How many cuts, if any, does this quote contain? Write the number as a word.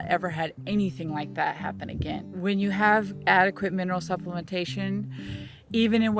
one